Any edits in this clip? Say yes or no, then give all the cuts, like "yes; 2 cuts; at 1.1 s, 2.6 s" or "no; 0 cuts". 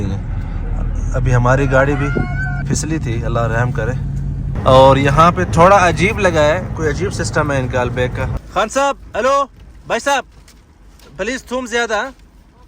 yes; 3 cuts; at 2.6 s, 4.5 s, 8.3 s